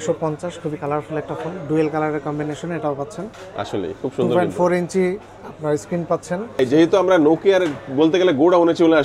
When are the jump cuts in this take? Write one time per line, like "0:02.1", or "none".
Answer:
0:06.6